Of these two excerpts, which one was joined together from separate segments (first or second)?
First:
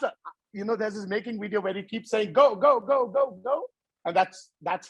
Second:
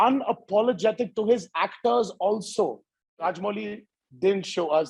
second